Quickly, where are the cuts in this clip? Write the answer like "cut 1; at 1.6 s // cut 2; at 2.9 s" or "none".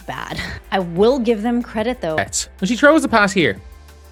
none